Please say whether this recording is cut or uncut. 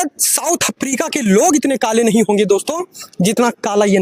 uncut